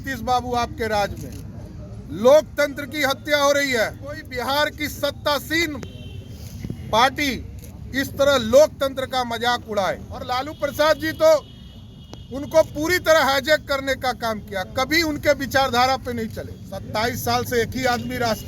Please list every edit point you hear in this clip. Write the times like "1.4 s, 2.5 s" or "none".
4.3 s, 10.5 s, 16.9 s